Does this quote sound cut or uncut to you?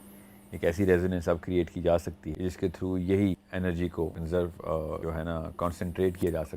cut